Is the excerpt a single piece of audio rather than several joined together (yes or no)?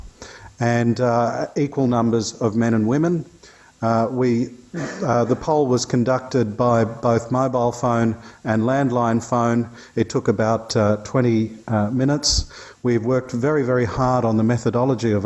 yes